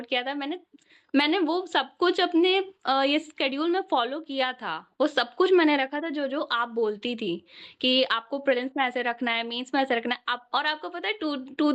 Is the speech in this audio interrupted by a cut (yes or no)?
no